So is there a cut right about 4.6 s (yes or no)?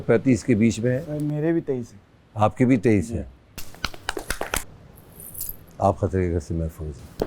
yes